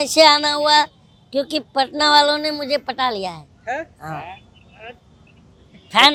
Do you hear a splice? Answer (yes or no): no